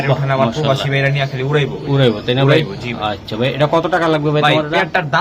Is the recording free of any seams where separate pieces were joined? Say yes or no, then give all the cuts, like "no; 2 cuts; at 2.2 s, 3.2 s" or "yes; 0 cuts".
yes; 0 cuts